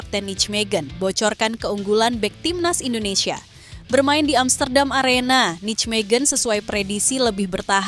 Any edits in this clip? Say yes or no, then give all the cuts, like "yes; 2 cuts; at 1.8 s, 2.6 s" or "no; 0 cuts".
no; 0 cuts